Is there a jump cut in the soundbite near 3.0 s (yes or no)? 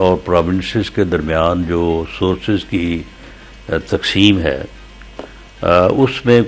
no